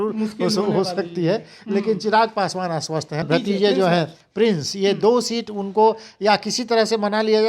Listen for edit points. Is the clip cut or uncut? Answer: cut